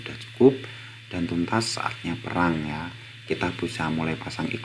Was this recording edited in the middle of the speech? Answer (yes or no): no